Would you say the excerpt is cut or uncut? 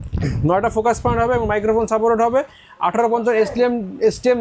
uncut